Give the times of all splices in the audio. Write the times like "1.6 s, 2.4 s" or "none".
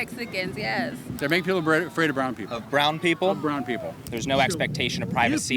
1.1 s, 4.0 s